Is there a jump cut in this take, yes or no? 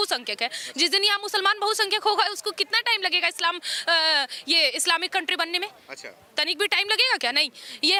no